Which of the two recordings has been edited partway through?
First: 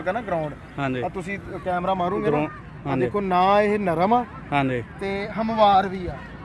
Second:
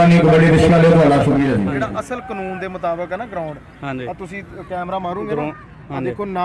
second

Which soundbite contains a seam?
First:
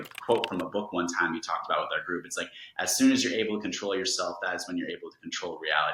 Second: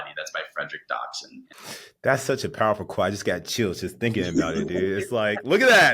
second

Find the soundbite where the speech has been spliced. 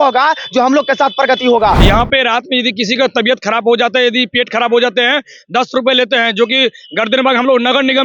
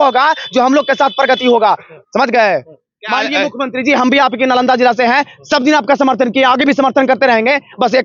first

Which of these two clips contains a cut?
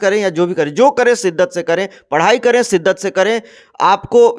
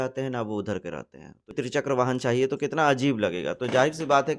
second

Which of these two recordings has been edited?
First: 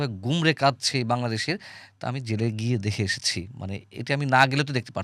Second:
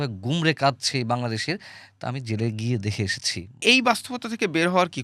second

